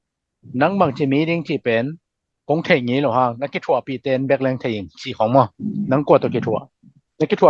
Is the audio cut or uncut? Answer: cut